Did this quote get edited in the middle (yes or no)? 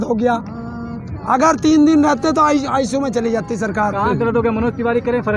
no